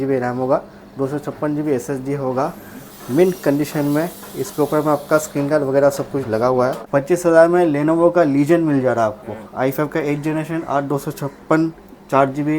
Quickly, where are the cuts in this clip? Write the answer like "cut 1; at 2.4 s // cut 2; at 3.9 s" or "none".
cut 1; at 6.8 s